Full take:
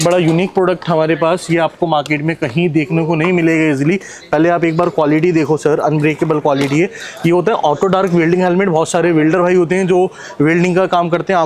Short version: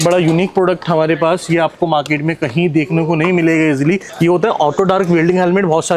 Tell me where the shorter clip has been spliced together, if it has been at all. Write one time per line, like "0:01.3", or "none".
0:04.1